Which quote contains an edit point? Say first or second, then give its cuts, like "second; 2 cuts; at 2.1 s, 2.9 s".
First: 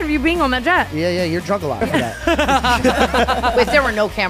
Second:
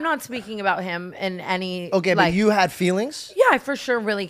first; 3 cuts; at 0.9 s, 1.8 s, 3.5 s